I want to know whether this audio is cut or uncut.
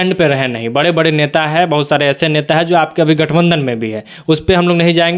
uncut